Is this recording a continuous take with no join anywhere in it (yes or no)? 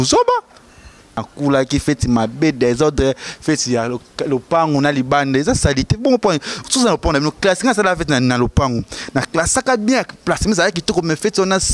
no